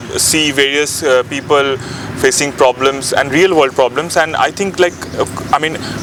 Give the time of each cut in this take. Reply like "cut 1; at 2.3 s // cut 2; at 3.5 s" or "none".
none